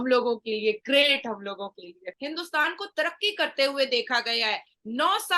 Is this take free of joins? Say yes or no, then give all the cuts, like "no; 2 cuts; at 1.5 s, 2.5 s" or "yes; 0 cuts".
no; 1 cut; at 2.1 s